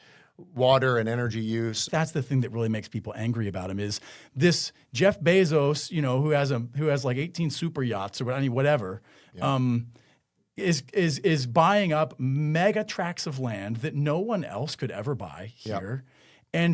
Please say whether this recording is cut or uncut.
cut